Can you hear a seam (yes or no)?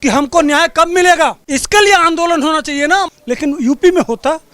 yes